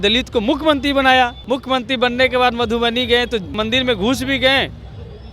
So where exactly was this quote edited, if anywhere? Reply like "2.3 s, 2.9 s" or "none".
1.4 s, 3.6 s